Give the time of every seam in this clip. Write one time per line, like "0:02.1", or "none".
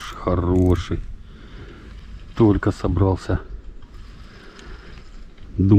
none